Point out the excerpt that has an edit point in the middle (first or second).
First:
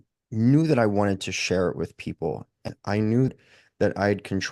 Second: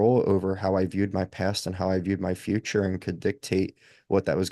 first